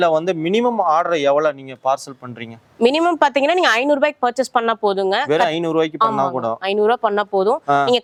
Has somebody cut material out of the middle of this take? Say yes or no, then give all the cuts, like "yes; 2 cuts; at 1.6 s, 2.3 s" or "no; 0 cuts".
no; 0 cuts